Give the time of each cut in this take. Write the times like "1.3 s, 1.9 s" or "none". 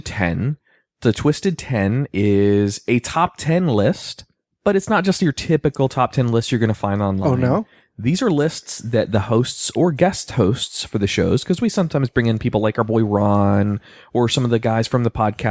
13.7 s